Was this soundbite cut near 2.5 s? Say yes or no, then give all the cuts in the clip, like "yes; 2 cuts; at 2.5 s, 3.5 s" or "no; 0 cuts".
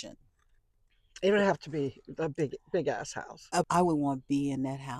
no; 1 cut; at 3.7 s